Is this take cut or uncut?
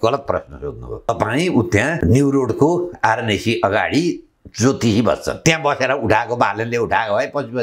cut